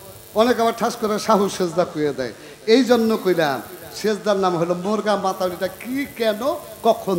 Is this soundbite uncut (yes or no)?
yes